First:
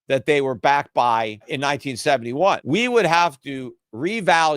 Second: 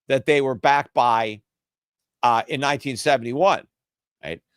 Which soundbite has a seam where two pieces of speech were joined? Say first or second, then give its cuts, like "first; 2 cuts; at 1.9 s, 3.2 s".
first; 2 cuts; at 1.5 s, 2.6 s